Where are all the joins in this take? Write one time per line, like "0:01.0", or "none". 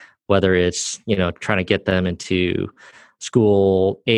none